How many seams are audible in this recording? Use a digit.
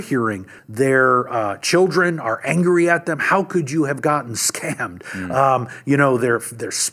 0